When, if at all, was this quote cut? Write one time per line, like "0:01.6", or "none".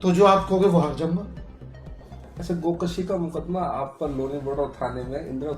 none

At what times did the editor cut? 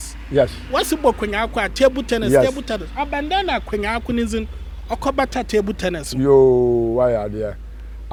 none

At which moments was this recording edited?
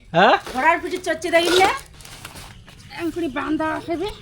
0:01.9

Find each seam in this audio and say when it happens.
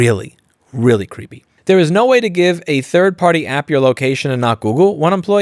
0:01.4

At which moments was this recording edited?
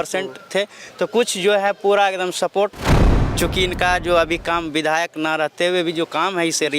0:03.0

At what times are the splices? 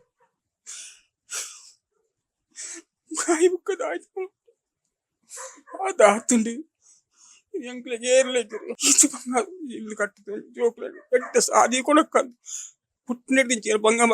0:08.7

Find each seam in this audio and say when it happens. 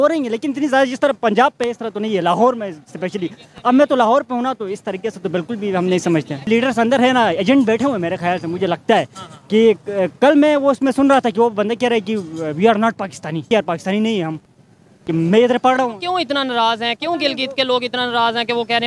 0:06.3
0:13.5

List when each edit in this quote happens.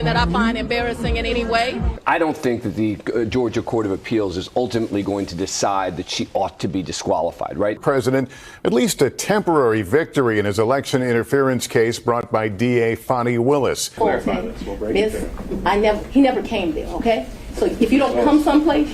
0:02.0
0:07.8
0:13.8

